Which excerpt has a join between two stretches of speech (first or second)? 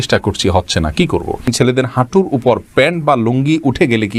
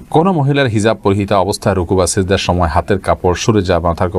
first